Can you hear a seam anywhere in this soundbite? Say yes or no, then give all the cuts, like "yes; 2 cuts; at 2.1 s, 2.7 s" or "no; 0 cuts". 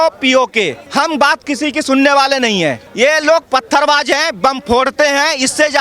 yes; 2 cuts; at 0.8 s, 2.8 s